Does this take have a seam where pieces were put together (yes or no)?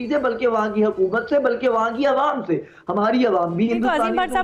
no